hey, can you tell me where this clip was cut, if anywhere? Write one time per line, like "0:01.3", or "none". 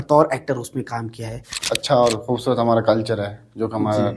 0:01.6